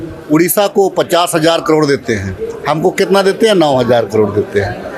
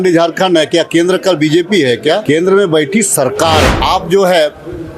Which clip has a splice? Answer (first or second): second